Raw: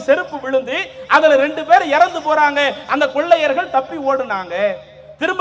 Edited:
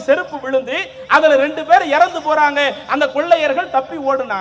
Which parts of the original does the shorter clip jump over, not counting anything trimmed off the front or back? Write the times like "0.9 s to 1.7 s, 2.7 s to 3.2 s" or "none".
none